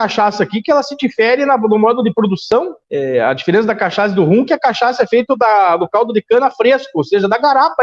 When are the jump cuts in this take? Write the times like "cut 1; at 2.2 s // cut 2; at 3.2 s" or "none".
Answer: none